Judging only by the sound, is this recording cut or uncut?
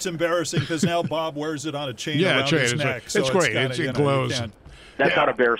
uncut